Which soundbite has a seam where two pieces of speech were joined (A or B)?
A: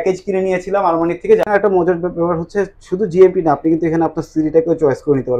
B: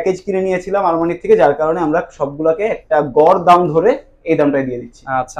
A